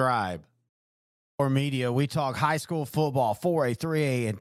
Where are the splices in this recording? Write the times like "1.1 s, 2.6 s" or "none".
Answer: 1.4 s